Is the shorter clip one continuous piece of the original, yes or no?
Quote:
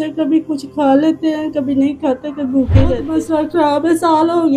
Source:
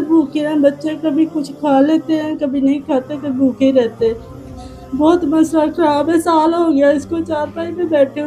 no